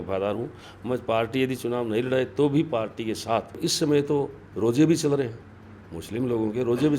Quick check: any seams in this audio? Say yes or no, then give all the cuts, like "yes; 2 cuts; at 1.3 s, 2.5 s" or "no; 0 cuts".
yes; 1 cut; at 3.6 s